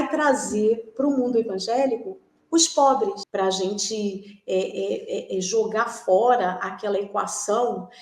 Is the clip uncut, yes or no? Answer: no